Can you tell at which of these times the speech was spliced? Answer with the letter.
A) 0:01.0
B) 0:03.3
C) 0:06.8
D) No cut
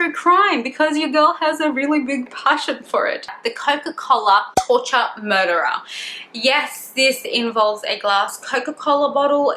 B